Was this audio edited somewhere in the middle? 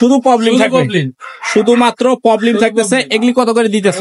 no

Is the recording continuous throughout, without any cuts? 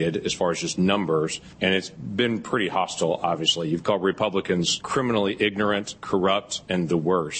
no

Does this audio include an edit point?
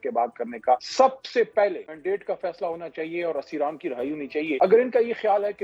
yes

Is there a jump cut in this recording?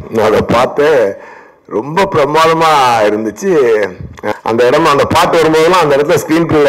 yes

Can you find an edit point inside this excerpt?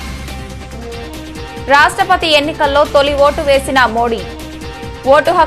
yes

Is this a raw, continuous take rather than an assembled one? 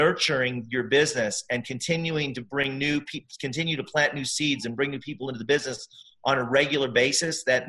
yes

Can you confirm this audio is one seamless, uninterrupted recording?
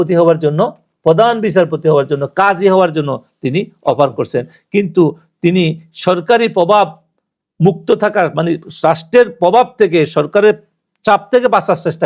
yes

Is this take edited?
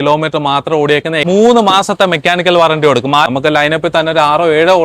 yes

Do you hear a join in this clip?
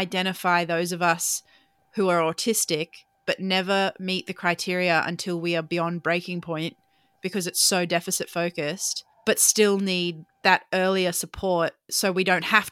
no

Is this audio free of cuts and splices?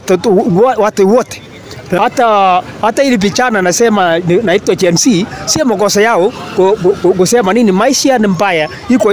no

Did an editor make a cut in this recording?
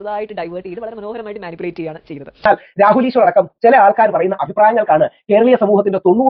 yes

